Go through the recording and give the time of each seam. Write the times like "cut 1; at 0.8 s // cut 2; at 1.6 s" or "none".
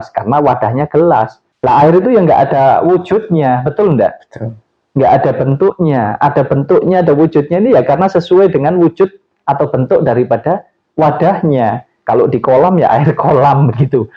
none